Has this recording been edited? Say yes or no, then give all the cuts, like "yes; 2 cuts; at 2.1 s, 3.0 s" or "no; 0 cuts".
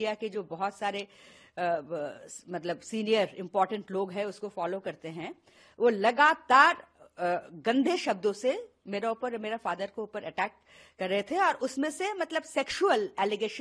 no; 0 cuts